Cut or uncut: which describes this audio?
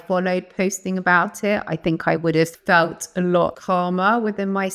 cut